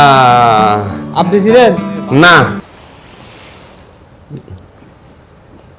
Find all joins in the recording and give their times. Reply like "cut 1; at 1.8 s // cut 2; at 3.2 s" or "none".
cut 1; at 2.6 s